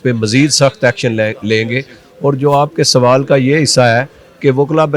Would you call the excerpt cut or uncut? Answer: uncut